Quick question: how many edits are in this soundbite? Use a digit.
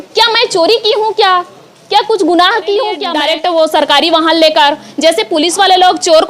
1